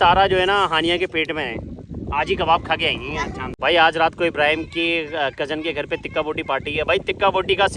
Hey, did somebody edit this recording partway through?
yes; 1 cut; at 3.4 s

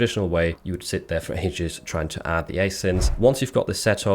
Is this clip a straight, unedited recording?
no; 1 cut; at 3.1 s

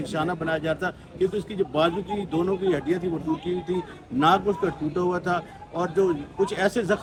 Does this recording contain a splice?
no; 0 cuts

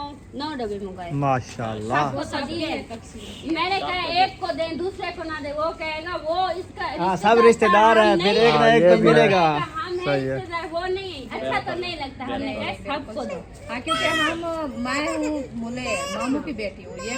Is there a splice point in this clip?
no; 0 cuts

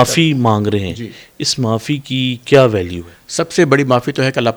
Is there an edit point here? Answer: no; 0 cuts

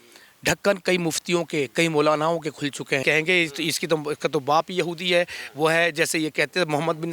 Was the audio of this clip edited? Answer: yes; 1 cut; at 3.0 s

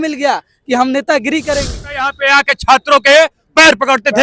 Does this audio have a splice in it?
yes; 1 cut; at 2.0 s

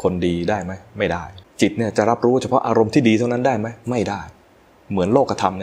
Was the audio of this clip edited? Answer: yes; 1 cut; at 1.4 s

